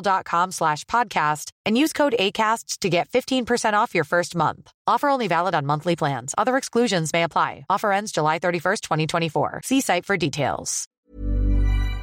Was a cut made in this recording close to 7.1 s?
no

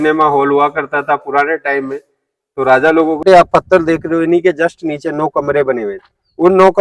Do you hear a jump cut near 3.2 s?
yes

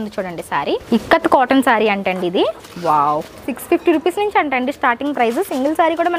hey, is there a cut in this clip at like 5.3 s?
no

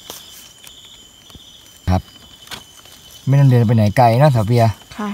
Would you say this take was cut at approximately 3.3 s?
no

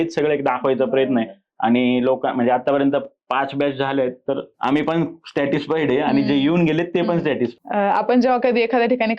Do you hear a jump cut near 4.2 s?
no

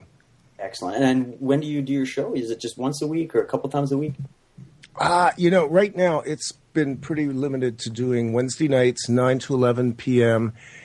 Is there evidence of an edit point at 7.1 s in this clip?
no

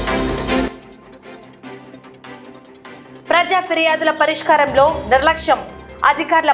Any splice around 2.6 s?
yes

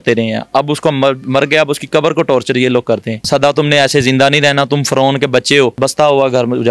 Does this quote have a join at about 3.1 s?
yes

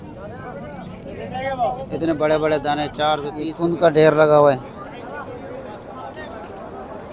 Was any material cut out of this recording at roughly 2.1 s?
no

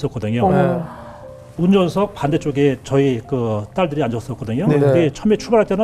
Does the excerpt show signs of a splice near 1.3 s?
yes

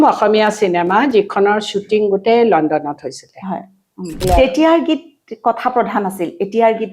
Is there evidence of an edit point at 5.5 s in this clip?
no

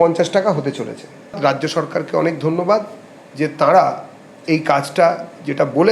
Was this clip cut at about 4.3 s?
no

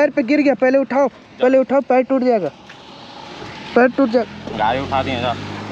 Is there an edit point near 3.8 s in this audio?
no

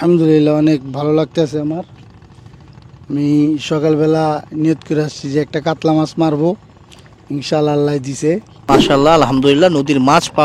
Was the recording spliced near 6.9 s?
no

